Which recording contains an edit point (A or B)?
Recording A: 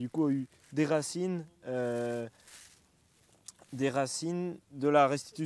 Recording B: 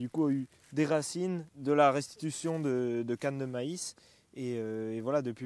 B